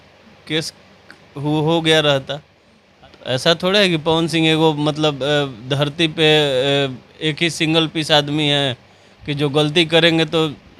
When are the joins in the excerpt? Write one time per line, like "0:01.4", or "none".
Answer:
none